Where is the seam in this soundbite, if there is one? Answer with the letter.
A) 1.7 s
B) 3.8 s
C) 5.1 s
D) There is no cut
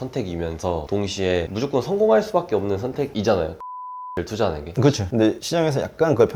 C